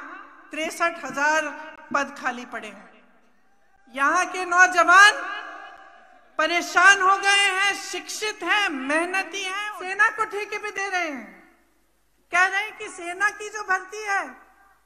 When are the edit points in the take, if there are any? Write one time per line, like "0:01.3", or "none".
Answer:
0:09.5

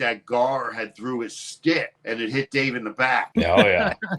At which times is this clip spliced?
0:02.0
0:03.3

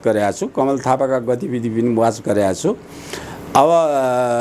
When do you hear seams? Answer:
none

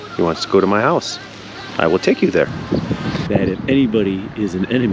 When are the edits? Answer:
0:02.6

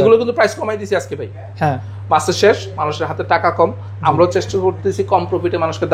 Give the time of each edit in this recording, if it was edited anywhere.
none

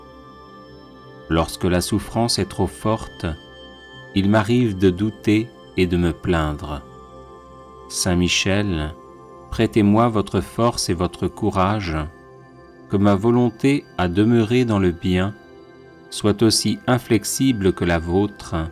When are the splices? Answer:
none

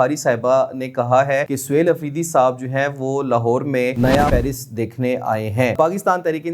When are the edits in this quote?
0:01.6
0:04.2
0:05.7

